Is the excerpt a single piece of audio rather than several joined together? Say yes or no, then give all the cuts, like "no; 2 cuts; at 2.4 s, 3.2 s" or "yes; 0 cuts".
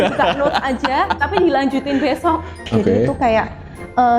no; 1 cut; at 2.6 s